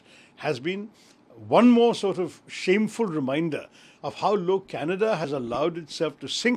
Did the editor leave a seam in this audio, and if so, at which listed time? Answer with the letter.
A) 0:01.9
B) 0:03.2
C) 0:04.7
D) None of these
D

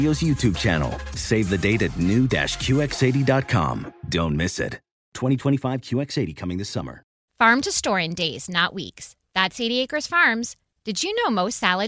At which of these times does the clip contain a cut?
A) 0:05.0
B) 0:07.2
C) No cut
B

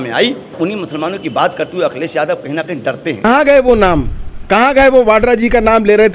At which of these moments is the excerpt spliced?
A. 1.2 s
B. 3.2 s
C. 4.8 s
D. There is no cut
B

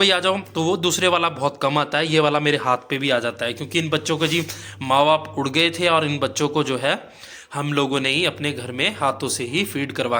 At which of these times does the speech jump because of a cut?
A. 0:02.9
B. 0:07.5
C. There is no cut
C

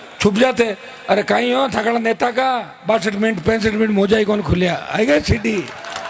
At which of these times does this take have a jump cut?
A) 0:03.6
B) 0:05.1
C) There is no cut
C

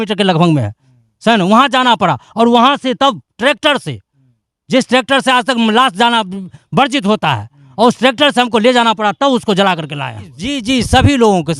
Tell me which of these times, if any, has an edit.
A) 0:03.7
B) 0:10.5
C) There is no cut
B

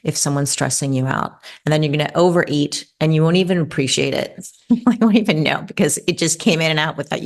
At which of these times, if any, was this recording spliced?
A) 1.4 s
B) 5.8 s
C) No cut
C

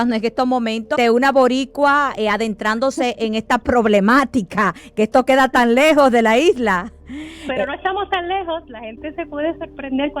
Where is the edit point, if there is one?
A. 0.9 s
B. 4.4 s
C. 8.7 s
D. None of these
A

